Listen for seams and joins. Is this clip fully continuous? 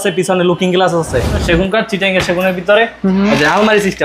no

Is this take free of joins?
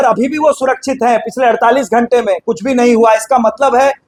yes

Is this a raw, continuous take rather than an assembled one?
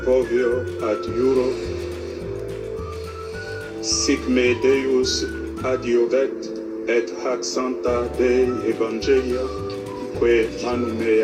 yes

